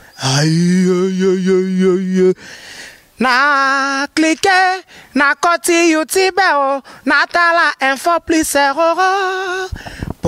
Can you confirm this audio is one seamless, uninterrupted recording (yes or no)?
yes